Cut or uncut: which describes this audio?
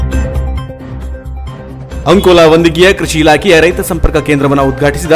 uncut